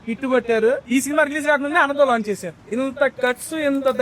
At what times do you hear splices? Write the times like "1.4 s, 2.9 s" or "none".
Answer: 0.8 s, 2.5 s